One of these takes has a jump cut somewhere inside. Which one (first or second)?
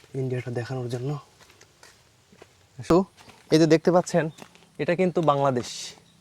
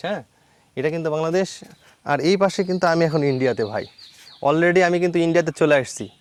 first